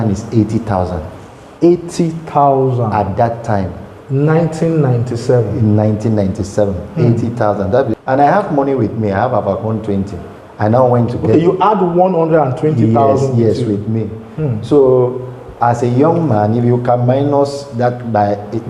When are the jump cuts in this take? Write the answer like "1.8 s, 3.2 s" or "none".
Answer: none